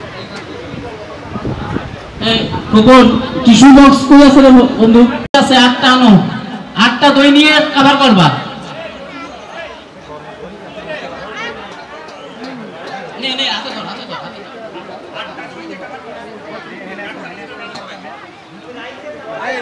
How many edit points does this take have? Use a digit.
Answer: 1